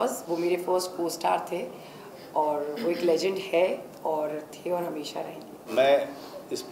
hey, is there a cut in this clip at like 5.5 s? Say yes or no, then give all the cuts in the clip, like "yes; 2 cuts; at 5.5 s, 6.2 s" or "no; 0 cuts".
yes; 1 cut; at 5.5 s